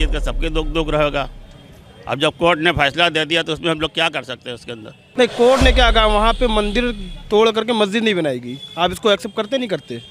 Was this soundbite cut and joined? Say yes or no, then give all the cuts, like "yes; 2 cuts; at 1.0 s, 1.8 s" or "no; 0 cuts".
yes; 1 cut; at 5.0 s